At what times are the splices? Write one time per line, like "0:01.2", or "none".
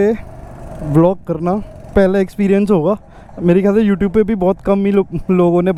none